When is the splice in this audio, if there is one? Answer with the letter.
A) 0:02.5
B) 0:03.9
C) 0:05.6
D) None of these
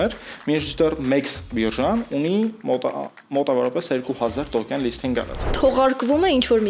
C